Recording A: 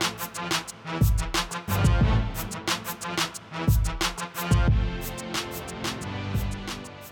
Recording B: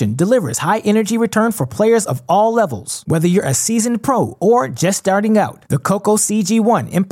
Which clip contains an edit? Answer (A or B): A